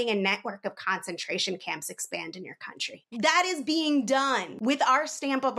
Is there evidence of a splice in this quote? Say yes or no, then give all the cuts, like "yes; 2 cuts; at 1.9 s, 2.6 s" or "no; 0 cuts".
yes; 2 cuts; at 3.1 s, 4.5 s